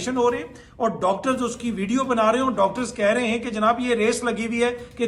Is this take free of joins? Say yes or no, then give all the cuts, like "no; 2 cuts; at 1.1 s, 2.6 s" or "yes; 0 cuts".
yes; 0 cuts